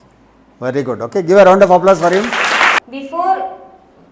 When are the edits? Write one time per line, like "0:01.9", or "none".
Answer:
0:02.8

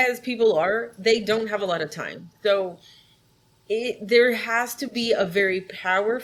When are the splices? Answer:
none

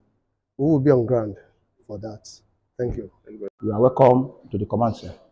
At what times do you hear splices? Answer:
0:03.1

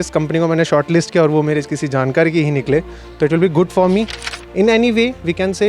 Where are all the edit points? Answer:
0:04.2

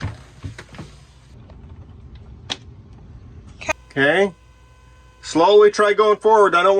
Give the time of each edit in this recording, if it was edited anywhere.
0:01.3
0:03.7

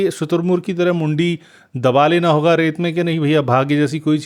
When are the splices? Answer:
none

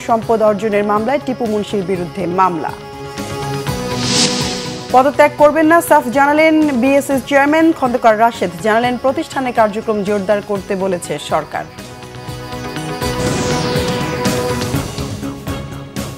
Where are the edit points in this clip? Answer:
0:15.3

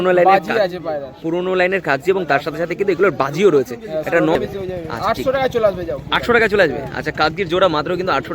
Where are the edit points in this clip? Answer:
0:04.3

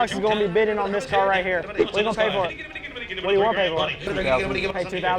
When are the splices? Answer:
0:01.8
0:04.0

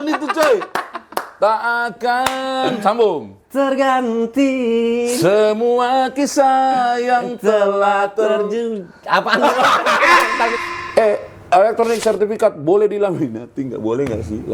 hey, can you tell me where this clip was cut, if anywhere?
0:10.5

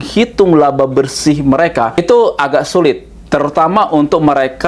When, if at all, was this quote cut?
0:02.0

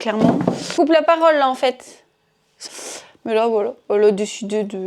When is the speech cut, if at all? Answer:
0:00.8
0:02.6

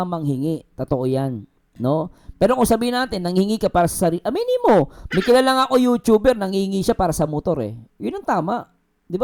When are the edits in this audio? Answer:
none

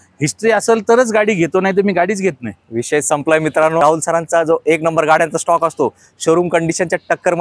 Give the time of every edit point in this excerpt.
0:03.8

